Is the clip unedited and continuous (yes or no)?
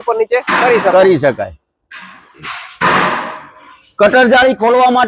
yes